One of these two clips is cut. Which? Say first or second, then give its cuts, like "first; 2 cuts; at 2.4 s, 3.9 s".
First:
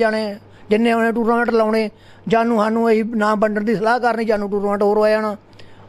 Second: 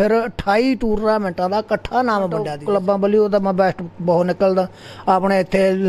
second; 1 cut; at 2.5 s